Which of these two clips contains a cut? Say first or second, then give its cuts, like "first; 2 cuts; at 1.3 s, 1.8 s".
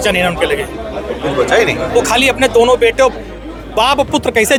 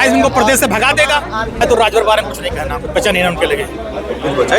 second; 1 cut; at 1.6 s